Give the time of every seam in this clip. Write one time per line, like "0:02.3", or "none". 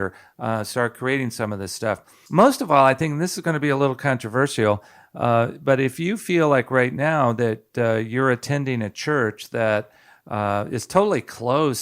0:02.1